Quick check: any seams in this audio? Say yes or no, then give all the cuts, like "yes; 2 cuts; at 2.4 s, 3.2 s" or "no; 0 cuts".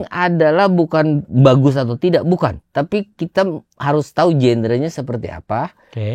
yes; 1 cut; at 1.3 s